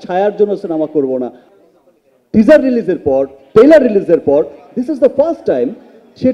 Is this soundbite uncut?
no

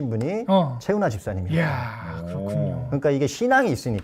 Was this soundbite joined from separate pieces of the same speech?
no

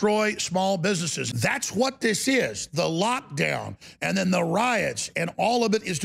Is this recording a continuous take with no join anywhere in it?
no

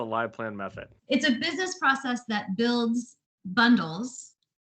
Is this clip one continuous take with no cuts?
yes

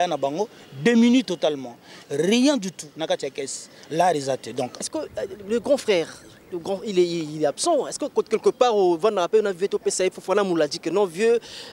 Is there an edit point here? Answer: yes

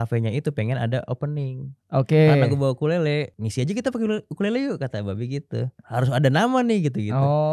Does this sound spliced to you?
yes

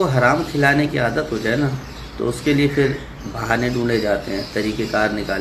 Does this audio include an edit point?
no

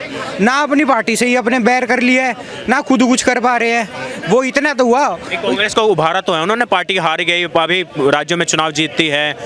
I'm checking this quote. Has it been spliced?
no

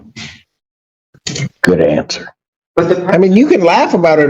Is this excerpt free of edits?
no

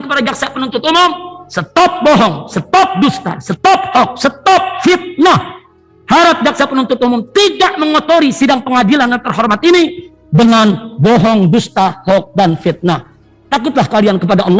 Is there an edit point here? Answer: no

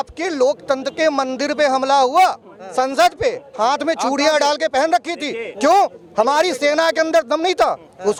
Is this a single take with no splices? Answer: yes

